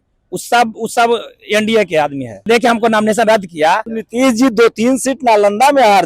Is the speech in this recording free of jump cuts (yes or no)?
no